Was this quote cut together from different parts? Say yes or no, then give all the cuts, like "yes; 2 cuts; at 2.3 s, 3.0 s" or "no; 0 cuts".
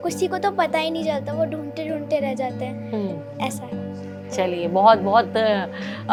no; 0 cuts